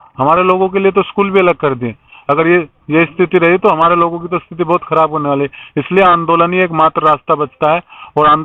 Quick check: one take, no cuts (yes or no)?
yes